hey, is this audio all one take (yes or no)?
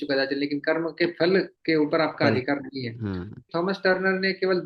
no